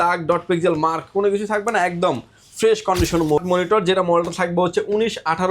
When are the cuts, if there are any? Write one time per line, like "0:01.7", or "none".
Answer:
0:03.4